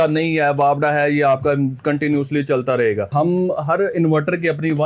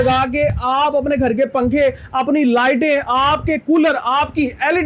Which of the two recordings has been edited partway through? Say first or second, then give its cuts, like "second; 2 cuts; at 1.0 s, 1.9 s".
first; 1 cut; at 3.1 s